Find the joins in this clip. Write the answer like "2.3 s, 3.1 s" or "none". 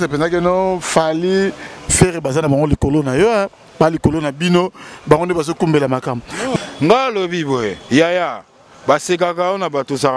6.6 s